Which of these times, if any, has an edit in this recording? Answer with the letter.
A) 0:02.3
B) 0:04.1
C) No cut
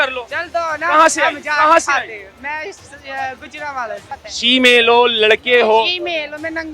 B